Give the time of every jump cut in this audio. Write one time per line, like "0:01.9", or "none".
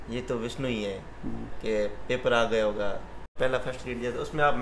0:03.3